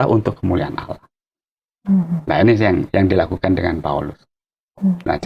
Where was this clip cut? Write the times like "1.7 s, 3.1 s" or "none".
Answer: none